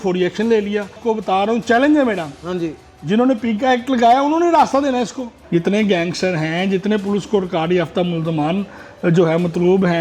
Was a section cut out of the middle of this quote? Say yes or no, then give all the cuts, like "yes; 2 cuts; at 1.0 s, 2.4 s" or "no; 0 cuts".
yes; 2 cuts; at 1.0 s, 5.3 s